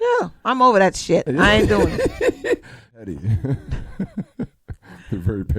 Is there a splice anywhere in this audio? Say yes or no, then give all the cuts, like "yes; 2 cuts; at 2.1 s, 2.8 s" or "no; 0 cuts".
yes; 1 cut; at 3.0 s